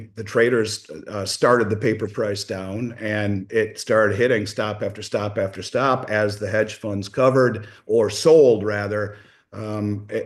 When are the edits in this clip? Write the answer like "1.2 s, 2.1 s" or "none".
none